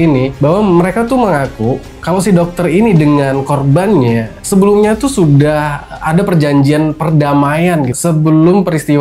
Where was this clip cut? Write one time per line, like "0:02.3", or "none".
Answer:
0:07.9